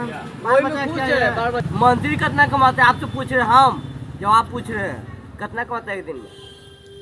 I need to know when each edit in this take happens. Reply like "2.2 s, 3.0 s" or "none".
1.6 s